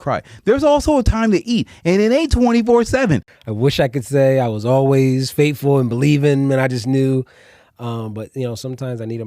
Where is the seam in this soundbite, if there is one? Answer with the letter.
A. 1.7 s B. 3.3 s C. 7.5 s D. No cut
B